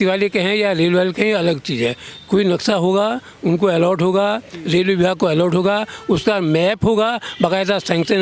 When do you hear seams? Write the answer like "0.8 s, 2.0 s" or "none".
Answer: none